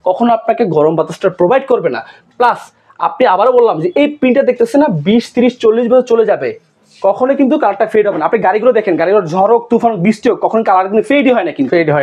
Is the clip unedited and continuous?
yes; 0 cuts

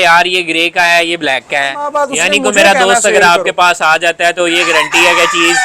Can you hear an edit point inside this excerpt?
yes; 1 cut; at 1.9 s

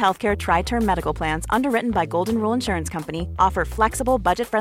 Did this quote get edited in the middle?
no; 0 cuts

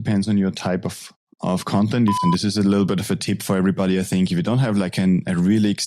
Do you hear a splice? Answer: yes; 1 cut; at 2.2 s

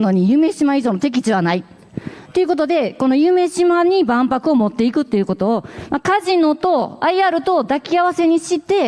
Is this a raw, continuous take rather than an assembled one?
yes; 0 cuts

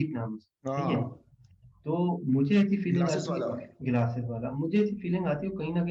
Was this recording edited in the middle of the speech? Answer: no; 0 cuts

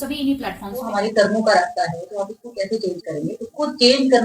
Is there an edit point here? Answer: yes; 1 cut; at 0.9 s

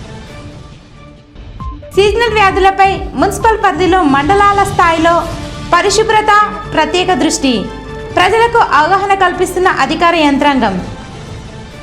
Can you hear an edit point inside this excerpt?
yes; 1 cut; at 1.4 s

